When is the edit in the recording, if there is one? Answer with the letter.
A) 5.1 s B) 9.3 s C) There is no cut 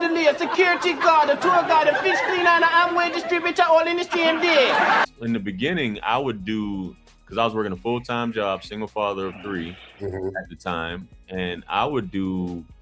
A